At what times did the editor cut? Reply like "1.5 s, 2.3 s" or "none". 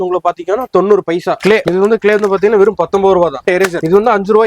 1.6 s, 3.4 s